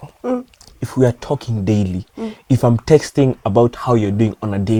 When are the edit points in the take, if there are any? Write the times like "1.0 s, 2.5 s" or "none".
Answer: none

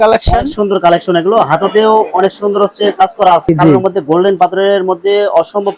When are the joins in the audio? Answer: 3.5 s

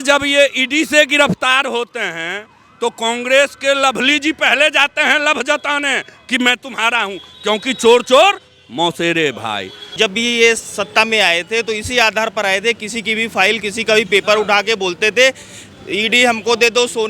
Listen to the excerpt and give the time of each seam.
9.8 s

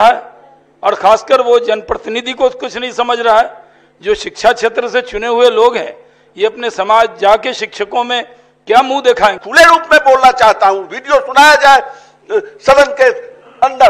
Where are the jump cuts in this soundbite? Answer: 9.4 s

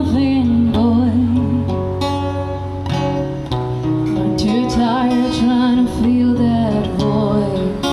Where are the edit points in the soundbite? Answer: none

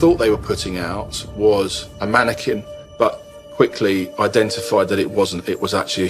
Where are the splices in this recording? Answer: 2.8 s

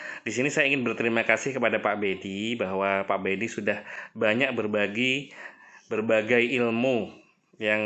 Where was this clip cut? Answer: none

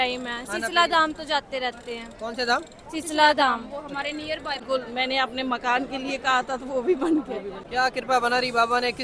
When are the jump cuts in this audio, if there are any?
4.6 s, 7.5 s

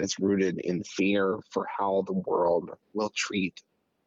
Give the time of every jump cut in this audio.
none

